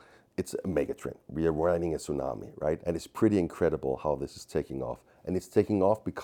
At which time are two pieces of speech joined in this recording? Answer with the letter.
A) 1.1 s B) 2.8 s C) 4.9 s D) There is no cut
B